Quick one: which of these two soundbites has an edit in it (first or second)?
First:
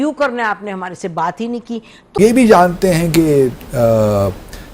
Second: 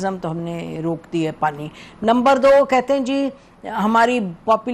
first